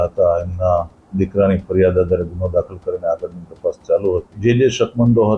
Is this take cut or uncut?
cut